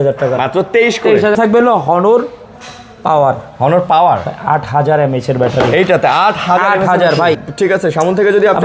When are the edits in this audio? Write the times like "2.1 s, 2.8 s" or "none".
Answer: 1.3 s, 7.5 s